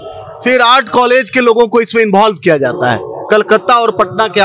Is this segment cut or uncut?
uncut